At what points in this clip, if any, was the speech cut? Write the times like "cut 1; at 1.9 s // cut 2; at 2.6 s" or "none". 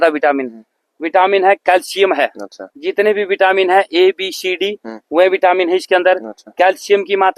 none